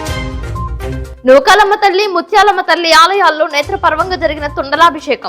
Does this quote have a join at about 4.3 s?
no; 1 cut; at 1.1 s

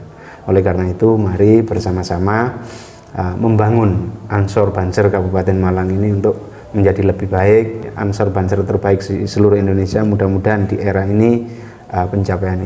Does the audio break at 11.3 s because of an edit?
no; 1 cut; at 7.9 s

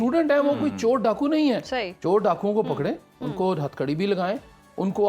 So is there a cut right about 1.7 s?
no; 0 cuts

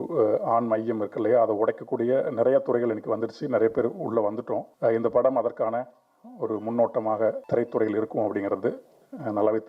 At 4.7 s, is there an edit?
yes; 2 cuts; at 4.7 s, 7.4 s

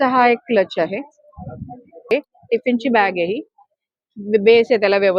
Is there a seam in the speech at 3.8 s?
no; 1 cut; at 2.1 s

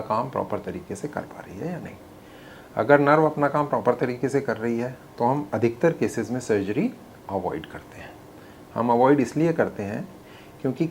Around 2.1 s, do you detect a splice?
no; 0 cuts

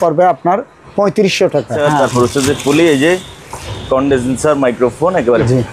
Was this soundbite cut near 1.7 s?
yes; 1 cut; at 1.7 s

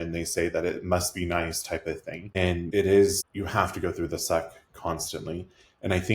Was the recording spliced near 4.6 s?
no; 2 cuts; at 2.6 s, 3.3 s

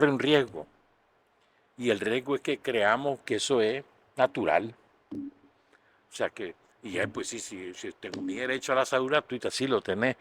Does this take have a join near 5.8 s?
no; 0 cuts

